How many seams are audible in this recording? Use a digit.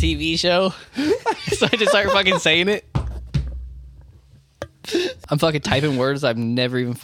1